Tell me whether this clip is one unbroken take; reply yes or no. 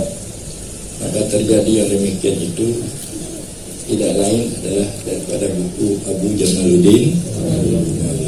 yes